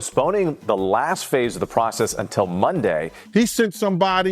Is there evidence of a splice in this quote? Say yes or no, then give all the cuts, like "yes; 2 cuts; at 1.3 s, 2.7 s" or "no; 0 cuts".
yes; 1 cut; at 3.2 s